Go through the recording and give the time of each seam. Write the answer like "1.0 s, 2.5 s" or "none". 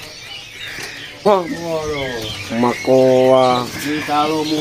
1.3 s